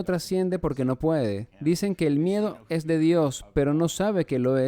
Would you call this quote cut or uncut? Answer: cut